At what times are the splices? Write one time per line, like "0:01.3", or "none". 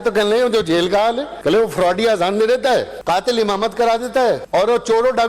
0:01.3
0:02.9
0:04.4

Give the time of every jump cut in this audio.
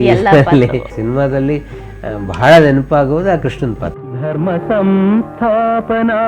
0:00.9
0:03.8

